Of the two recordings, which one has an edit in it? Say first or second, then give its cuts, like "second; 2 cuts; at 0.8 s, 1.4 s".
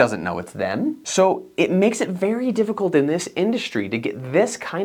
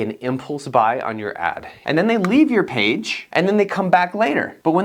second; 1 cut; at 1.7 s